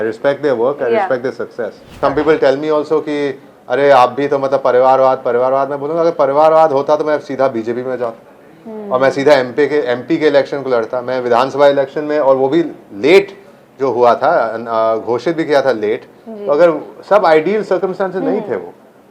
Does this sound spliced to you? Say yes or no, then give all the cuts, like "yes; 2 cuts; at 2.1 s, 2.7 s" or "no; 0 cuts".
yes; 1 cut; at 1.9 s